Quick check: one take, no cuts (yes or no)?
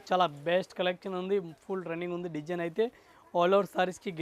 yes